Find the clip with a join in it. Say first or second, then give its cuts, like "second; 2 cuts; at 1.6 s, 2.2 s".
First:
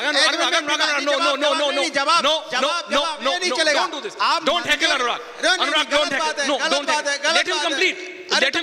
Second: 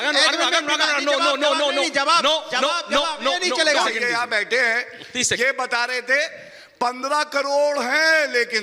second; 1 cut; at 3.9 s